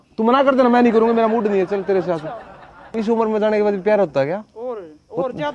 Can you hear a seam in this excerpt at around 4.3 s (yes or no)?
no